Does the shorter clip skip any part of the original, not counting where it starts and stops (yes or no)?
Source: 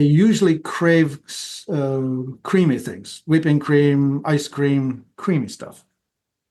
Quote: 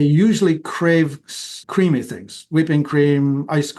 yes